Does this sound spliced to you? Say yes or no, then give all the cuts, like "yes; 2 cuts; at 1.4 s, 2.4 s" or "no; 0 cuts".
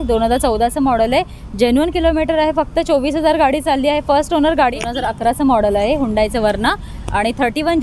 yes; 1 cut; at 4.8 s